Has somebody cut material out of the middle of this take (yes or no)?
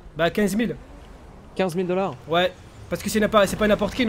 no